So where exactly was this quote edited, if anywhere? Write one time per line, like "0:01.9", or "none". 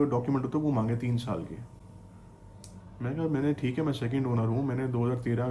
none

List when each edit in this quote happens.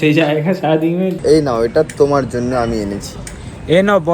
0:01.2

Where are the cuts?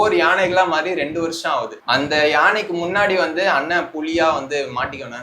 0:01.8

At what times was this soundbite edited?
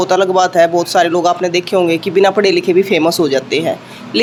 none

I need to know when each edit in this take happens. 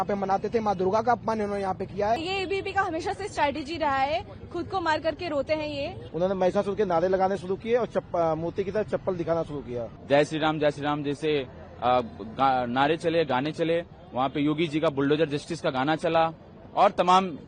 0:02.2
0:06.0
0:09.9

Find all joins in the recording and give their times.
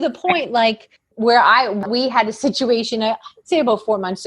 0:01.9

